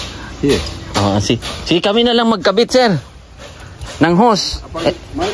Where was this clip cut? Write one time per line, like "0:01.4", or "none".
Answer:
none